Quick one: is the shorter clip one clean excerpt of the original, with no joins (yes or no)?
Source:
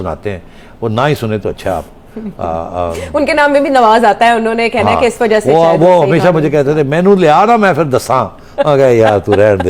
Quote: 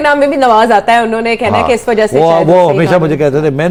yes